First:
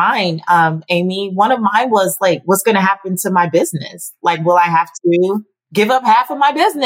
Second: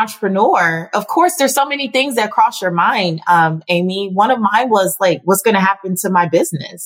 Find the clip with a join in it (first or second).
first